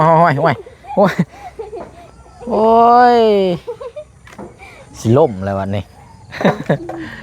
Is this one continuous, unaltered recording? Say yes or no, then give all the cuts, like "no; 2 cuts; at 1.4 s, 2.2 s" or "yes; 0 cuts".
yes; 0 cuts